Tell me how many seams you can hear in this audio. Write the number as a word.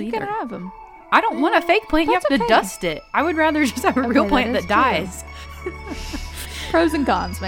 one